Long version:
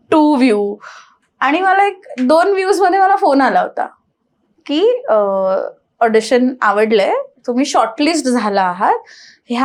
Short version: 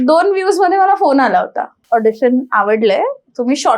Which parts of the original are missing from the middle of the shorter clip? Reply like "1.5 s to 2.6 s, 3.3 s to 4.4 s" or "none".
3.9 s to 5.8 s